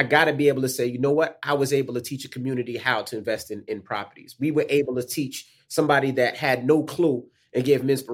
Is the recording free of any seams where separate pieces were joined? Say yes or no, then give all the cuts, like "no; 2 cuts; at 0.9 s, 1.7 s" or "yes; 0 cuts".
yes; 0 cuts